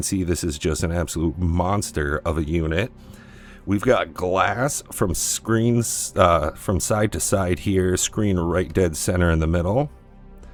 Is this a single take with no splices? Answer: yes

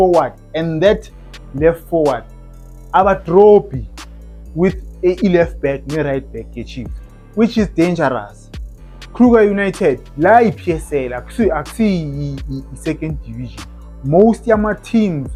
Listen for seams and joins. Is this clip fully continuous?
yes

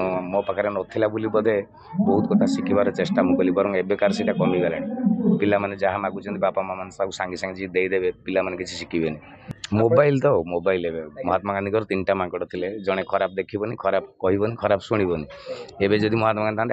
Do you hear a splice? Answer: yes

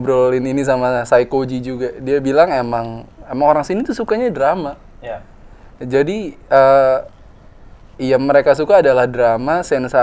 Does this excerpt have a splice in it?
no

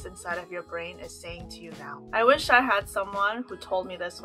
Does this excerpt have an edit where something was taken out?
yes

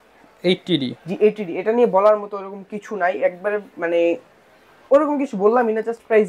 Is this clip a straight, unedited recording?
yes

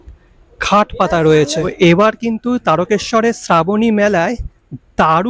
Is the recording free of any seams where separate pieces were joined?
no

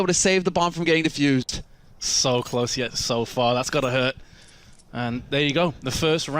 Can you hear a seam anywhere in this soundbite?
yes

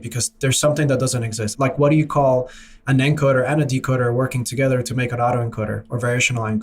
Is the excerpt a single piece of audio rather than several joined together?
no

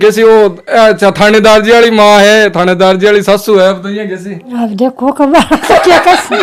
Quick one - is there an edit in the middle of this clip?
no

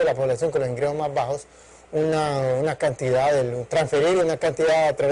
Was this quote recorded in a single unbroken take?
yes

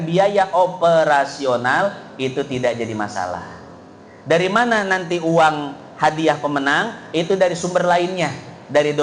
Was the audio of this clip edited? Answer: no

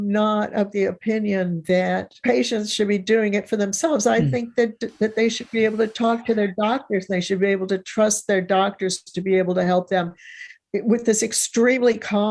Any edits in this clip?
yes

